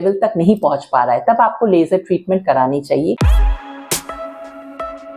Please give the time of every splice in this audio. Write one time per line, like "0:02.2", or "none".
0:03.2